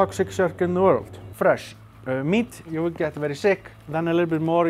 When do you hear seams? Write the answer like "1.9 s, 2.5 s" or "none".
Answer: 1.2 s, 2.7 s, 3.7 s